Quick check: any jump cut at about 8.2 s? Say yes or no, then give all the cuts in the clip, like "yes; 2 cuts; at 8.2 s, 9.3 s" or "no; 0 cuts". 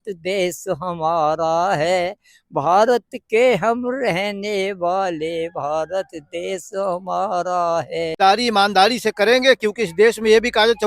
yes; 1 cut; at 8.2 s